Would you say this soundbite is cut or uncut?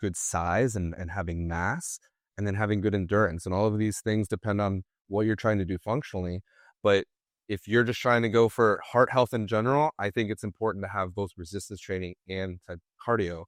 uncut